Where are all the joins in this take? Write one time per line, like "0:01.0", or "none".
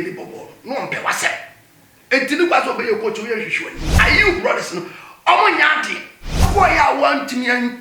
0:04.0
0:06.5